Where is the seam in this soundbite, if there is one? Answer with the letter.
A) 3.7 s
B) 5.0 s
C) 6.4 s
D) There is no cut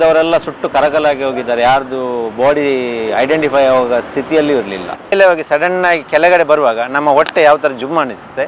B